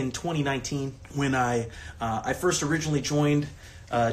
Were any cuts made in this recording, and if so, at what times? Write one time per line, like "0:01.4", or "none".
0:01.0